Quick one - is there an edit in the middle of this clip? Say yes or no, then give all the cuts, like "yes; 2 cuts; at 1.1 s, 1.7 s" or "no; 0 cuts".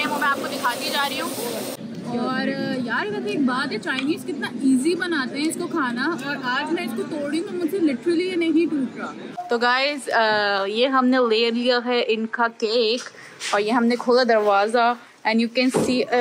yes; 2 cuts; at 1.7 s, 9.4 s